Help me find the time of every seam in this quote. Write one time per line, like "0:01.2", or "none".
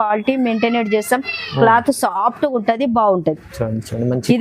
0:03.5